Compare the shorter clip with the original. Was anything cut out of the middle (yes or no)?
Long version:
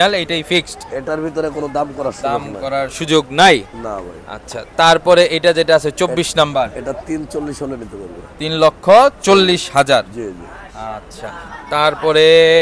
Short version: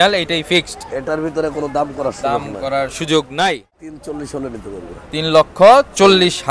yes